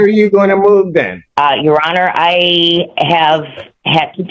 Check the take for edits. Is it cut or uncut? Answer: cut